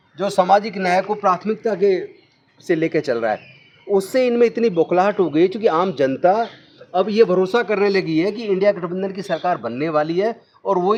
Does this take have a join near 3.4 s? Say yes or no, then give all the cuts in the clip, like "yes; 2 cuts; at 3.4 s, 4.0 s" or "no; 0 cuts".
no; 0 cuts